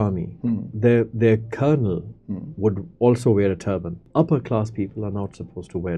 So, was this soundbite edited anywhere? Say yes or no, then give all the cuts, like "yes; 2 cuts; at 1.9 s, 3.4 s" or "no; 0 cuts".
yes; 1 cut; at 4.1 s